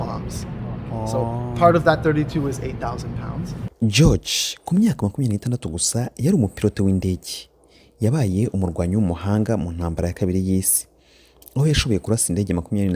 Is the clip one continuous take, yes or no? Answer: no